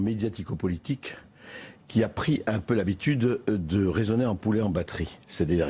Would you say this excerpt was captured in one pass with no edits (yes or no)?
no